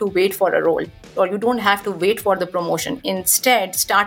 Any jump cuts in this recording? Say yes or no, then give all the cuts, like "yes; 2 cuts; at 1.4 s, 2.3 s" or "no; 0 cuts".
yes; 1 cut; at 1.1 s